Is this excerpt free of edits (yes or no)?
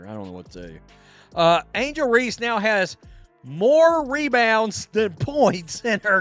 yes